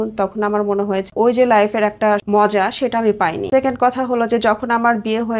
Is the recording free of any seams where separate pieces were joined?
no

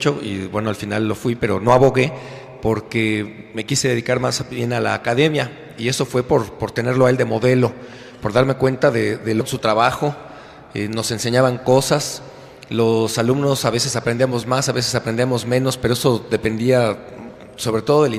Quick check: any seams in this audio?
no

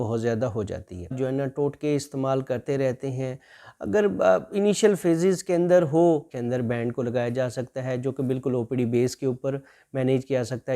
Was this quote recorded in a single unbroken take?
no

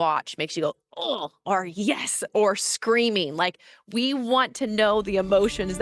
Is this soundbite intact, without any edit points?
yes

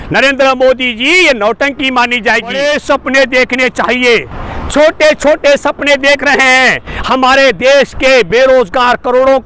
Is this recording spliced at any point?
yes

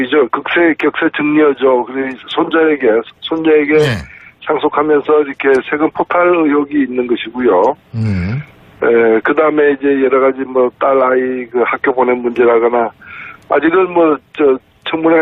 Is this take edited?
no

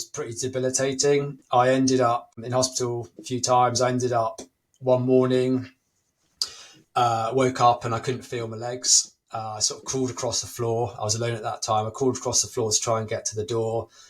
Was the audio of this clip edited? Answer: yes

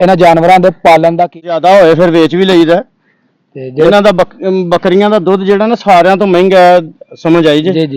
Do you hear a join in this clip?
yes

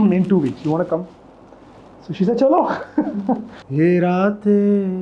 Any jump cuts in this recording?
yes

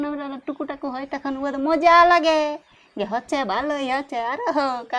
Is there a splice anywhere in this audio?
no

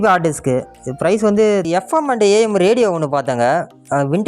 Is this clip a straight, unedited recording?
no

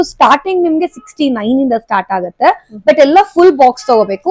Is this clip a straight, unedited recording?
yes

